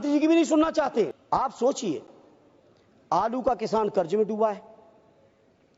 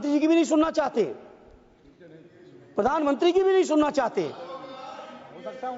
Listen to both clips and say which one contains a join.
first; 1 cut; at 1.2 s

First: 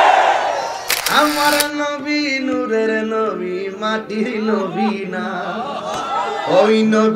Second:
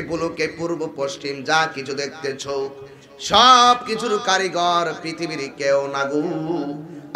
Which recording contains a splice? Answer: first; 1 cut; at 0.9 s

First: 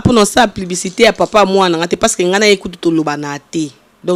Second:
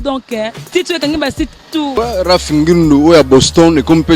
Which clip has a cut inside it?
second; 1 cut; at 1.9 s

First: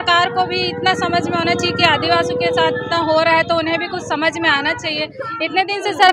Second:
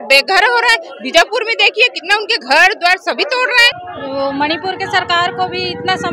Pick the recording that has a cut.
second; 1 cut; at 3.7 s

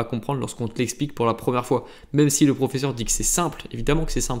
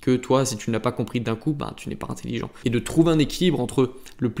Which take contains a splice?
second; 1 cut; at 2.5 s

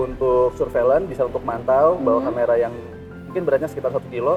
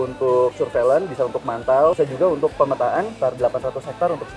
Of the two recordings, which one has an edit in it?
second; 2 cuts; at 1.9 s, 3.1 s

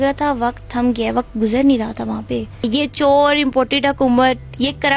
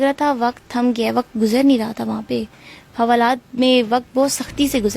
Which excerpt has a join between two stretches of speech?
first; 1 cut; at 2.6 s

